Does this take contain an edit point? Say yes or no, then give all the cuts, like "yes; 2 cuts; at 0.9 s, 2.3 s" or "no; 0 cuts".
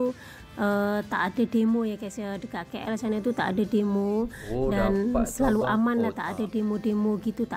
no; 0 cuts